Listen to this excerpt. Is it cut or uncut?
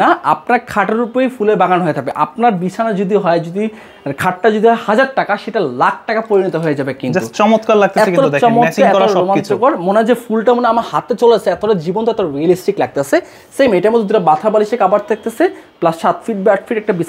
uncut